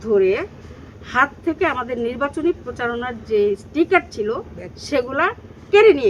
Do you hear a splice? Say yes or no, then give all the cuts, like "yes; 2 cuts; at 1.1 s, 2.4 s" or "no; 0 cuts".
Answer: no; 0 cuts